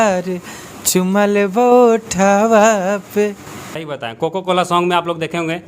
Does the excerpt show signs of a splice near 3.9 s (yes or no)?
yes